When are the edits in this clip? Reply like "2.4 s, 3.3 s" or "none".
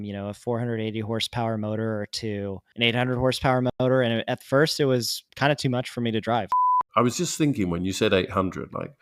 2.6 s, 5.2 s, 6.8 s